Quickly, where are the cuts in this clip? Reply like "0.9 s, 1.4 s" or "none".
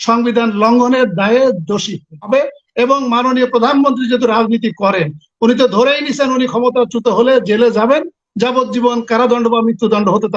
2.3 s